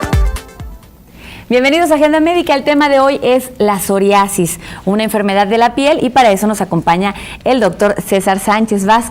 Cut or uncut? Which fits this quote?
uncut